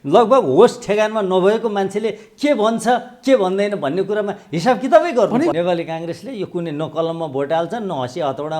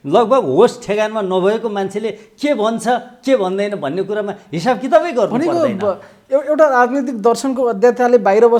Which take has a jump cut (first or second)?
first